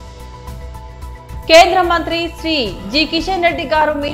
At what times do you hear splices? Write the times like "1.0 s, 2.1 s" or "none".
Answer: 1.5 s